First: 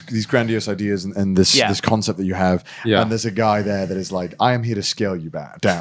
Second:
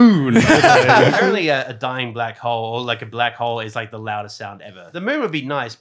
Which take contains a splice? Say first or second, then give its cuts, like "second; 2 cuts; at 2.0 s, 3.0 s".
second; 2 cuts; at 1.1 s, 4.9 s